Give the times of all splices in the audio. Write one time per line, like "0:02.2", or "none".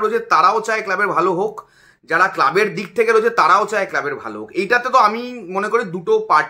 none